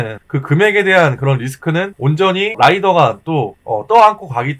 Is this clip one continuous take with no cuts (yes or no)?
no